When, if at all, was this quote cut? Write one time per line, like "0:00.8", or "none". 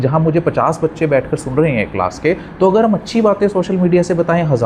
none